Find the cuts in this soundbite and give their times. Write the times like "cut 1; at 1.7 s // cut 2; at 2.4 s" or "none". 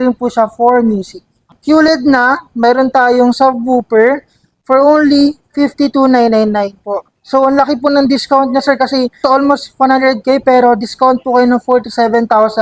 cut 1; at 1.5 s // cut 2; at 9.2 s